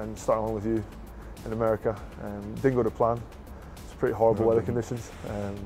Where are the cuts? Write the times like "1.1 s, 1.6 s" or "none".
none